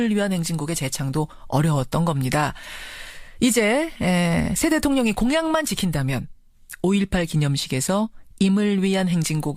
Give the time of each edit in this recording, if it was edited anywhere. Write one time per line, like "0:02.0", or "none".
none